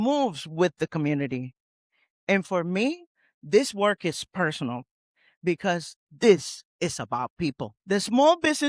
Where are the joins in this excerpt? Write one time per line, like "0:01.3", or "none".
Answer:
0:07.8